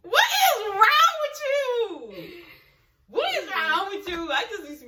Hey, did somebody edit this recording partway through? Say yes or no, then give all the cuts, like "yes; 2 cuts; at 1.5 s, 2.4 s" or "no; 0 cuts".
no; 0 cuts